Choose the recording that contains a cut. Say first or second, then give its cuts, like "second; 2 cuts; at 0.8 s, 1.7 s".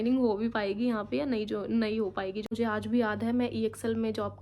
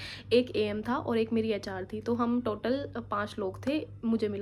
first; 1 cut; at 2.5 s